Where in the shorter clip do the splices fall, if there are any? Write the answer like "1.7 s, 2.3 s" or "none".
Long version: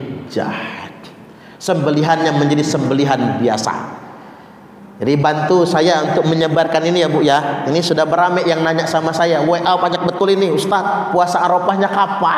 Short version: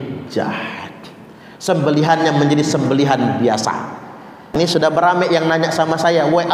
4.5 s